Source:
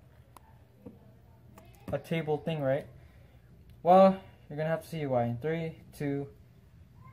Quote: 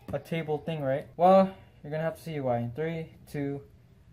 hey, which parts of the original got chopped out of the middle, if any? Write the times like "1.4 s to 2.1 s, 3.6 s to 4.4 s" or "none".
2.9 s to 3.7 s